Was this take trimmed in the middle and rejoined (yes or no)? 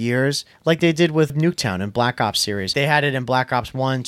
yes